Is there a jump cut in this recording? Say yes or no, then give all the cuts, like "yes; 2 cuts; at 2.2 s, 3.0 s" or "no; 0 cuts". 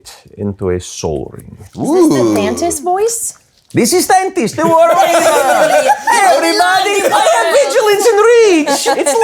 no; 0 cuts